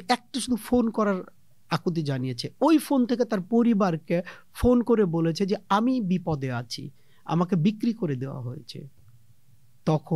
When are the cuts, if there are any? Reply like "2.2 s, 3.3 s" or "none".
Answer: none